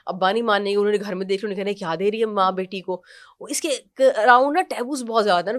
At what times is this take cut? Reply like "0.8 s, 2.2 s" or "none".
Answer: none